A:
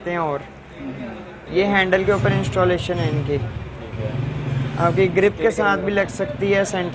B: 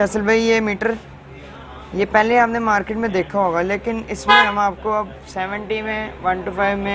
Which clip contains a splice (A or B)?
A